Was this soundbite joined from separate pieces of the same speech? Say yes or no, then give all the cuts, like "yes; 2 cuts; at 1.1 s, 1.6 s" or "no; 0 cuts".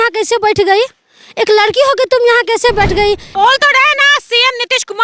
yes; 1 cut; at 3.3 s